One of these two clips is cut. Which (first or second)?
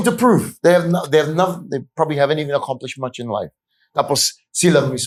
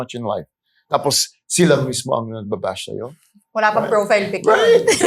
second